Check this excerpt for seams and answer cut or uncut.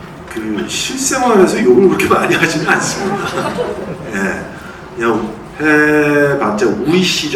uncut